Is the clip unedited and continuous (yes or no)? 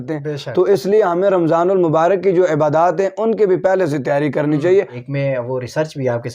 no